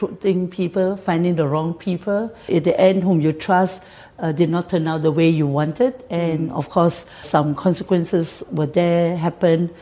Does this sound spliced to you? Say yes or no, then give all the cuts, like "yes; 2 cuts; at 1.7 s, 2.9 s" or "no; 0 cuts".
yes; 3 cuts; at 2.4 s, 7.3 s, 8.4 s